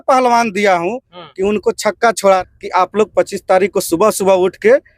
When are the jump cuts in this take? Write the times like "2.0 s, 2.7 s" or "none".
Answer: 2.4 s